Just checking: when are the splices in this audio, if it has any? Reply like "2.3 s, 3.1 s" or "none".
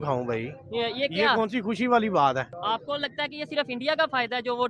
2.5 s